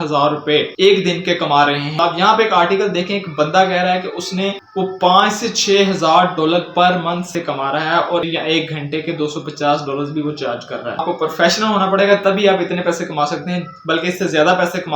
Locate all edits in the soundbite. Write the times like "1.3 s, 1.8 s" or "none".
2.0 s, 7.3 s, 8.3 s, 11.0 s